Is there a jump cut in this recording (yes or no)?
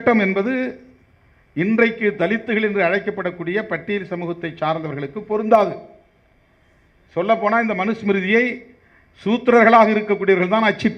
no